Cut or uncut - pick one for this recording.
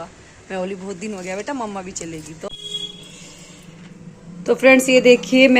cut